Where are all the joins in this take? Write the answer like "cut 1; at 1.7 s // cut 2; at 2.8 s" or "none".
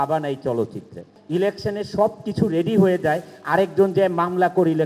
cut 1; at 1.1 s

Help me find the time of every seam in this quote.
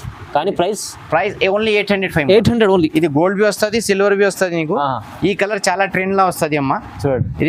none

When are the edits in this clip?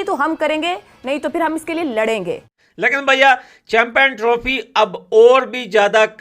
cut 1; at 2.5 s

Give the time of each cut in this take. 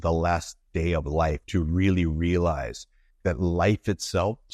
none

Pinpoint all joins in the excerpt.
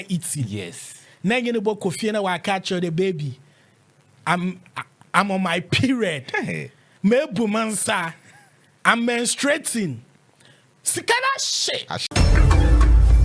cut 1; at 12.0 s

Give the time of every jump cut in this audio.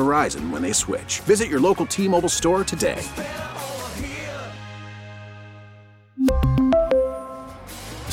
none

